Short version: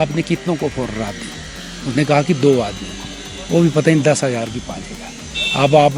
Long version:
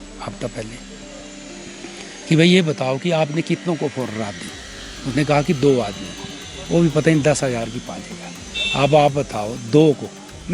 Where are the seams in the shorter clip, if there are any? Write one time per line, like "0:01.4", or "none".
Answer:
none

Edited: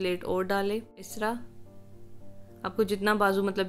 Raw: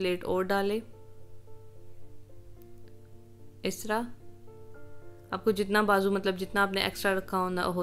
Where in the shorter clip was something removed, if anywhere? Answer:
0:01.1

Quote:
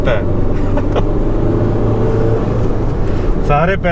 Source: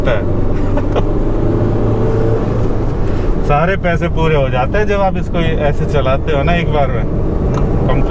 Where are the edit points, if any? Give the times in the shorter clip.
none

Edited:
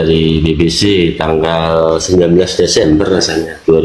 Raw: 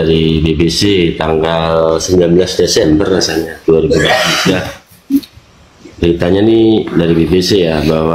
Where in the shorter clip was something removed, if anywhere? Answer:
none

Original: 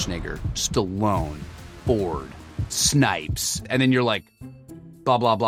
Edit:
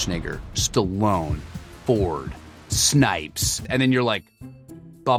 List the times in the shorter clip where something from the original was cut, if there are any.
none

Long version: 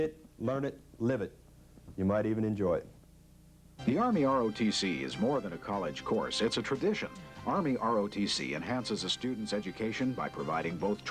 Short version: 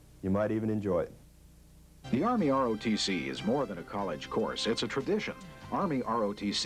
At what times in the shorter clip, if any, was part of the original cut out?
none

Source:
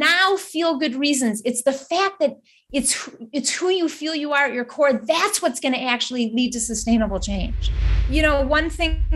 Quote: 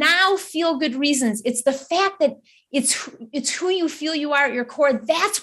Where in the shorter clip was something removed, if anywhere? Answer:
none

